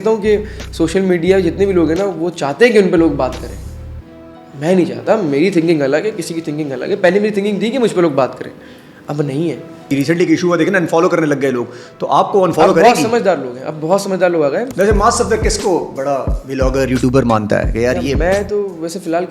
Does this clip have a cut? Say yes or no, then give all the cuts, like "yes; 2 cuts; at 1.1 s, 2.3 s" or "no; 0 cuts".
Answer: yes; 2 cuts; at 9.9 s, 14.7 s